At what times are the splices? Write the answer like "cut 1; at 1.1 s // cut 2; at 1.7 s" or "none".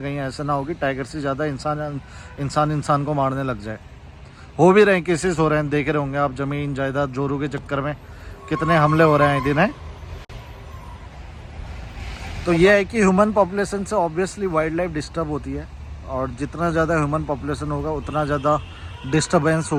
none